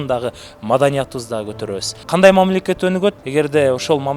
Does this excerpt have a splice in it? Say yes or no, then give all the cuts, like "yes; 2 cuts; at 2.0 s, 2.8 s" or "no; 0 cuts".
yes; 2 cuts; at 1.9 s, 3.2 s